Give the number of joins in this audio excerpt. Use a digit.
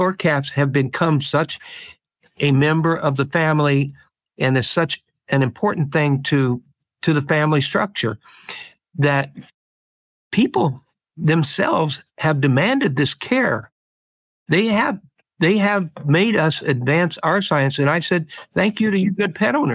0